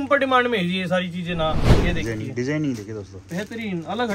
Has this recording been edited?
yes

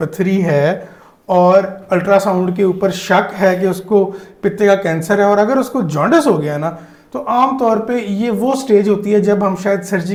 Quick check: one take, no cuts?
yes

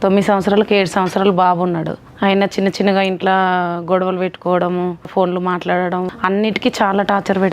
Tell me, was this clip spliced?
yes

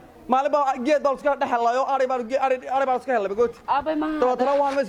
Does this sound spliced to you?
no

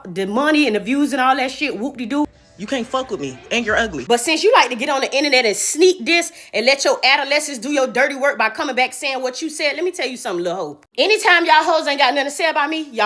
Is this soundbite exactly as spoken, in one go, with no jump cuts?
no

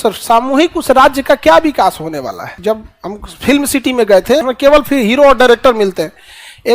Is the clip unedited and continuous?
no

